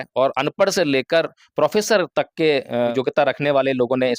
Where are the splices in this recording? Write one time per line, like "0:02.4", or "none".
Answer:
0:02.9